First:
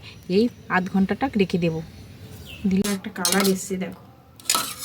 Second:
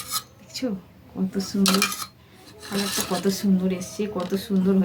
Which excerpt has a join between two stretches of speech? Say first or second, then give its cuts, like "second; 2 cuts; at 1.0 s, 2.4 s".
first; 1 cut; at 2.8 s